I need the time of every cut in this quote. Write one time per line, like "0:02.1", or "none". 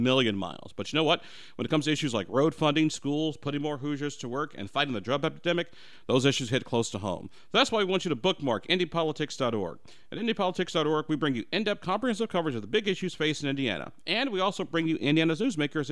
none